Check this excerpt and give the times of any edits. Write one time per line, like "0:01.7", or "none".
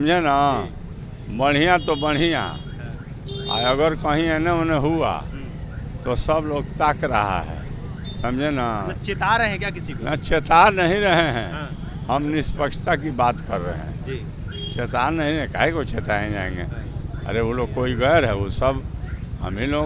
none